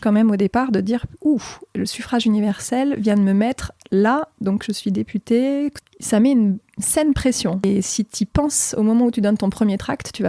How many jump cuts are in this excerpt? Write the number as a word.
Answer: two